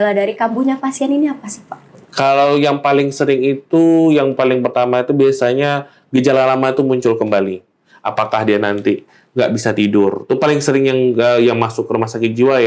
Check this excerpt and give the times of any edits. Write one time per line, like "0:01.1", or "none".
none